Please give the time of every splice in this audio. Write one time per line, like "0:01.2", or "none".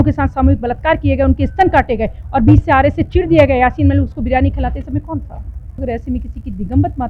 0:05.7